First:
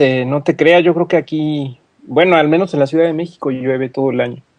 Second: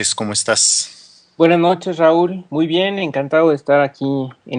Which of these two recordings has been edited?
second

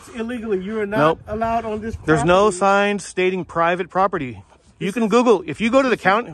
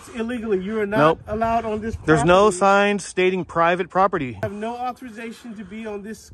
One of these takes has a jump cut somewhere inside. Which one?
second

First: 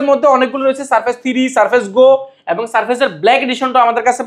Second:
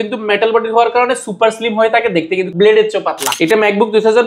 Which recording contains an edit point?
second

